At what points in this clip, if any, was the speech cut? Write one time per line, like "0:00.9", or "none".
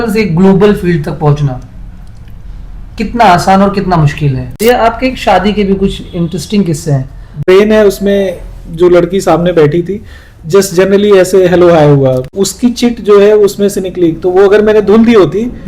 0:04.4
0:07.4
0:12.3

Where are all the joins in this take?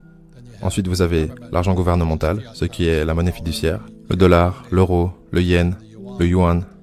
none

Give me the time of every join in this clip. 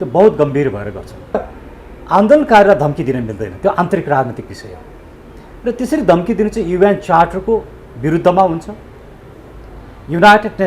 0:01.4

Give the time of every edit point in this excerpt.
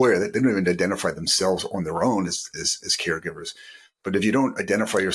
none

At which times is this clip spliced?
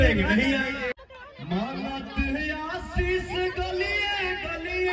0:00.9

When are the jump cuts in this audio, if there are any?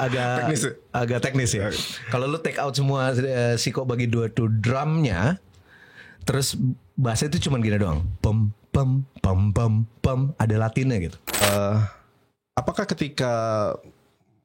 0:11.4

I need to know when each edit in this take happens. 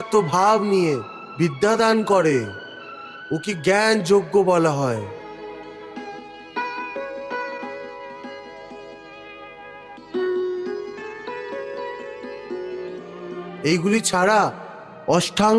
none

